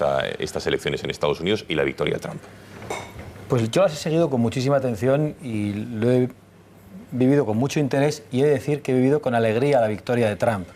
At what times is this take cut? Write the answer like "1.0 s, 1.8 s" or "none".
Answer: 7.5 s